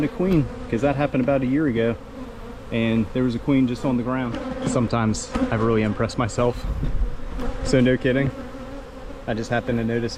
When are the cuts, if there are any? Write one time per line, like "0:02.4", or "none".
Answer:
0:04.4